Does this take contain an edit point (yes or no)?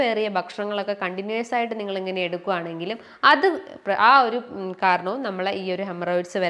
no